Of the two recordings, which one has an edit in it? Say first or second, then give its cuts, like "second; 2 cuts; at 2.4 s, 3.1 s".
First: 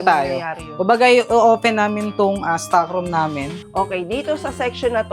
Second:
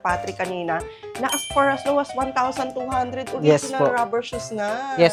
first; 1 cut; at 3.6 s